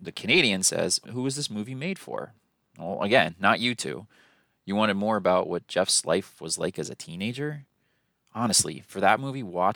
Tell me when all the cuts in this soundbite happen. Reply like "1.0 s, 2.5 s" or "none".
1.0 s